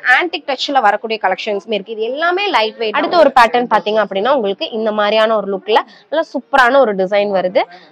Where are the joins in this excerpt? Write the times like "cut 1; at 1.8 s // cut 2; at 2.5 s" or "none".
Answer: cut 1; at 2.9 s